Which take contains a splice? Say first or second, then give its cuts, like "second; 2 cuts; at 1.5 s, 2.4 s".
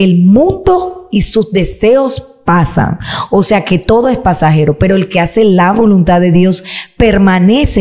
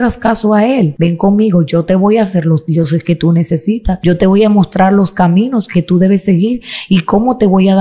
second; 2 cuts; at 0.9 s, 4.0 s